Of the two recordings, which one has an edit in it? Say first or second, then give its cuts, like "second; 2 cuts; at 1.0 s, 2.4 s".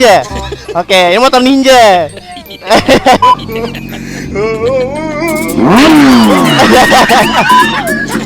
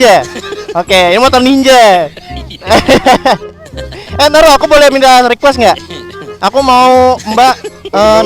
first; 1 cut; at 3.2 s